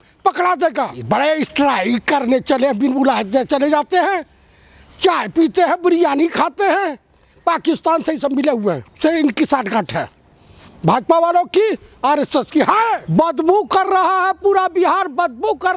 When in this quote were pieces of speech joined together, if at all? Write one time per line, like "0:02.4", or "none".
0:01.0
0:13.1